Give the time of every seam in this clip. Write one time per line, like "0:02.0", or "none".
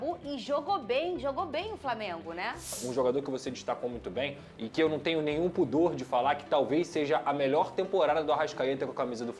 0:02.7